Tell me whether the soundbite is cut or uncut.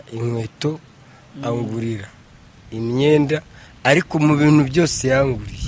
uncut